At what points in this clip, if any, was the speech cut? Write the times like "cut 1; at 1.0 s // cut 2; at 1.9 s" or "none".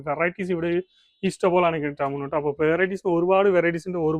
none